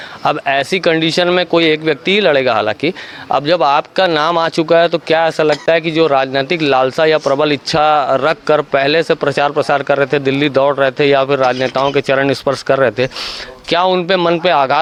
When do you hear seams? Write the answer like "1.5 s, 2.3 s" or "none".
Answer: none